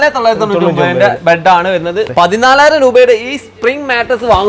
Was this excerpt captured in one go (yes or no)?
no